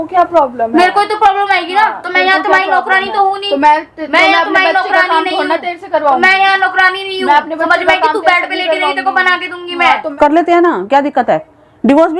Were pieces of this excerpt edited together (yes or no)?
yes